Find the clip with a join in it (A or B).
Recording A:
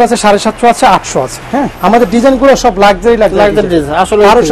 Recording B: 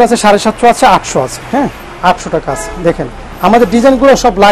A